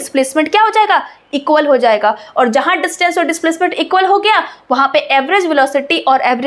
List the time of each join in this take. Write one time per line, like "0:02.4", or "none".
none